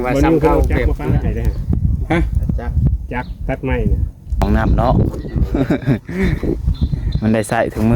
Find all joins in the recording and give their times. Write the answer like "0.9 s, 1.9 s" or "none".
4.4 s

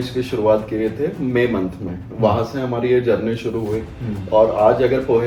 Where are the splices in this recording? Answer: none

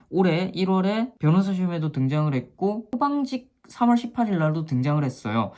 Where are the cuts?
2.9 s

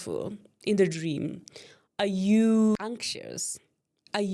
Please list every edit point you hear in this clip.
none

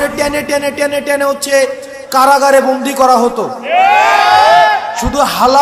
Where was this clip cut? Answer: none

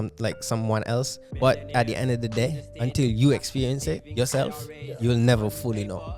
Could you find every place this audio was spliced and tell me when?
none

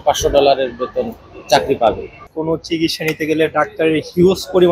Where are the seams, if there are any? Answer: 2.3 s

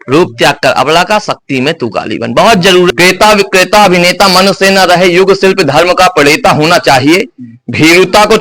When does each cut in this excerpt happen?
2.9 s

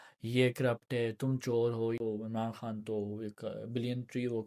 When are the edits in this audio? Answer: 2.0 s

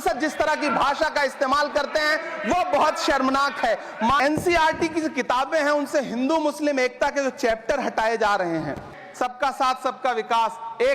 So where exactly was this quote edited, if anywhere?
4.2 s, 9.0 s

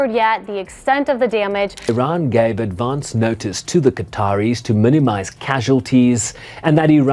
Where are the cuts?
1.8 s

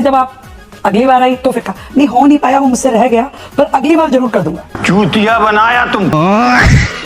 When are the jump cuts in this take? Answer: 6.1 s

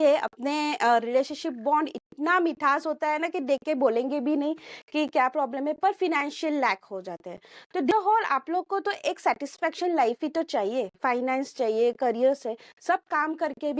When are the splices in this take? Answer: 7.9 s

